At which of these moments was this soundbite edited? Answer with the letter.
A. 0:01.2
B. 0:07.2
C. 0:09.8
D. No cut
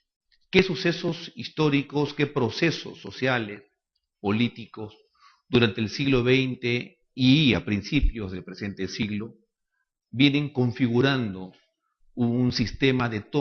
A